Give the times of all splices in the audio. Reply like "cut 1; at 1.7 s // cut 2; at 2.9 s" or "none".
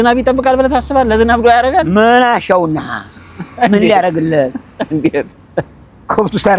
none